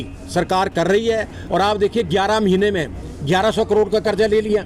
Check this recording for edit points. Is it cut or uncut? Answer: cut